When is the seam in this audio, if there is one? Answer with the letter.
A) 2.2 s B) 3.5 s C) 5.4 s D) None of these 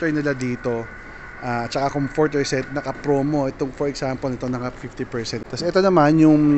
C